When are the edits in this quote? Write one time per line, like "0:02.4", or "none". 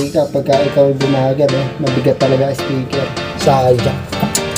0:03.3